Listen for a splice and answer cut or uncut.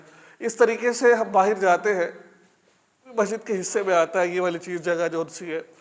cut